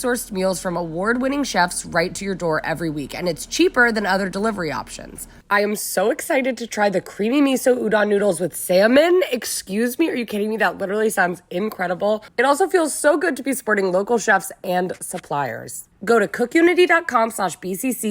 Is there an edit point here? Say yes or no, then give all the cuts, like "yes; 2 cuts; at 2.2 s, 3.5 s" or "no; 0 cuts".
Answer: yes; 1 cut; at 15.8 s